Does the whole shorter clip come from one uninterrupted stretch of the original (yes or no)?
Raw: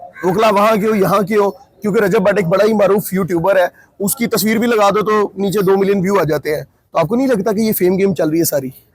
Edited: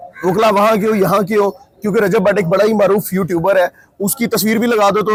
yes